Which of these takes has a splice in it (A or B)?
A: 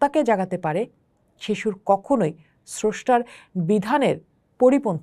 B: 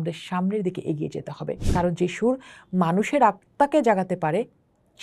B